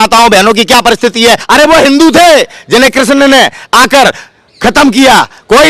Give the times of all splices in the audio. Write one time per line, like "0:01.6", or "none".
0:01.4